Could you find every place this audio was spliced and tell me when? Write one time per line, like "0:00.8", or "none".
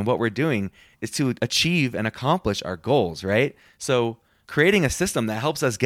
0:01.2
0:04.0